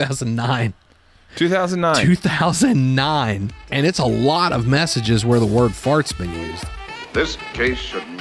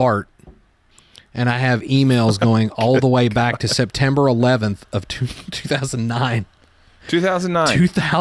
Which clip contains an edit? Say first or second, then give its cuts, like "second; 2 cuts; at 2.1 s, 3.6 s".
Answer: first; 2 cuts; at 3.7 s, 6.2 s